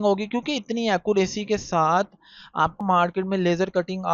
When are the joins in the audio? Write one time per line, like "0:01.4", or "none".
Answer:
0:02.8